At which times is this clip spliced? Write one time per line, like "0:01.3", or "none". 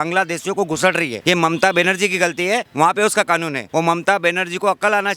0:01.1
0:02.7
0:03.6